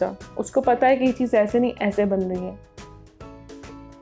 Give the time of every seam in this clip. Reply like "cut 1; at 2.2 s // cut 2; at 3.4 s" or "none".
none